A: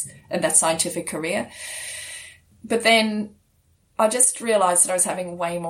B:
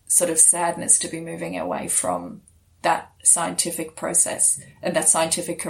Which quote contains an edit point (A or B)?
A